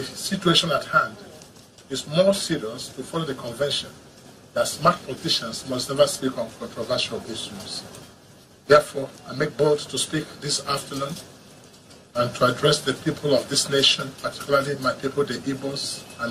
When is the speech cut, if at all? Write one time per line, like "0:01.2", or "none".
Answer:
none